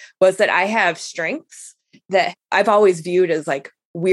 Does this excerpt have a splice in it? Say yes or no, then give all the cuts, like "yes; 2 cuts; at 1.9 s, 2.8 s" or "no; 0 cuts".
yes; 1 cut; at 2.3 s